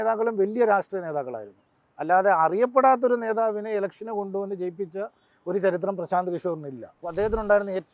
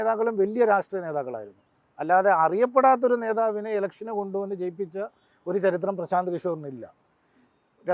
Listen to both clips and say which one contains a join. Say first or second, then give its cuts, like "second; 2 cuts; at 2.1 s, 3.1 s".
first; 1 cut; at 7.0 s